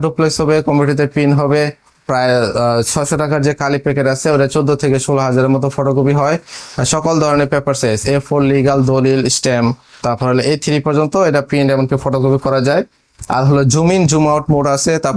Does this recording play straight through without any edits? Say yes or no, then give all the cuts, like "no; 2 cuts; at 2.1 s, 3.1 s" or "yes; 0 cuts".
yes; 0 cuts